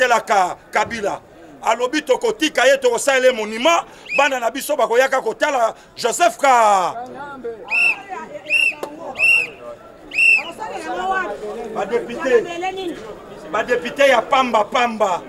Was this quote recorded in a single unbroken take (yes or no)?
yes